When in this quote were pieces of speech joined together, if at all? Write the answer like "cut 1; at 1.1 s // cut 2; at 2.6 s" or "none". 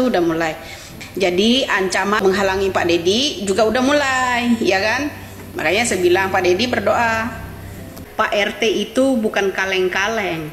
cut 1; at 2.2 s // cut 2; at 8.0 s